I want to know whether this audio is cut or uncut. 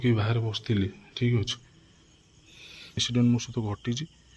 cut